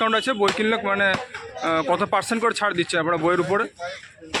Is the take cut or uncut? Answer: uncut